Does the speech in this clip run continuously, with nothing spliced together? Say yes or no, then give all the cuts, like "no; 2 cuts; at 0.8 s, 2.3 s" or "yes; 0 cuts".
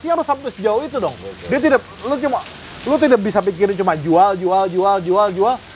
yes; 0 cuts